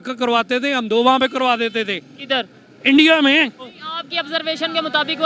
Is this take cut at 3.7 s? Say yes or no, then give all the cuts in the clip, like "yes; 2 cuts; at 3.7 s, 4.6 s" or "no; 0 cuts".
yes; 1 cut; at 3.7 s